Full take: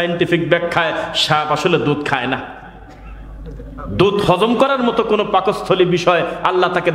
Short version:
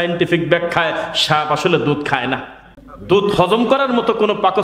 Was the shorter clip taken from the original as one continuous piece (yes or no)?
no